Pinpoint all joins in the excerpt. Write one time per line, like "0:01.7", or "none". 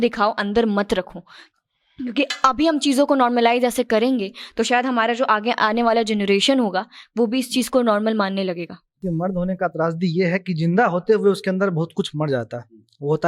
0:09.0